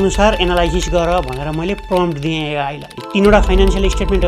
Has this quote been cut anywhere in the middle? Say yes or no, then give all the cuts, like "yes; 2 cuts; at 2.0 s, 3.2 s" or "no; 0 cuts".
yes; 1 cut; at 3.0 s